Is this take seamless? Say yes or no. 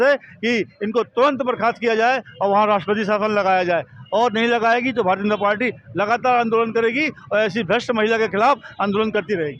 yes